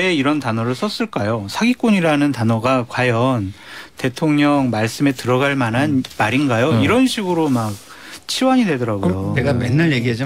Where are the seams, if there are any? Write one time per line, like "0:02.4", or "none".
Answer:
0:09.3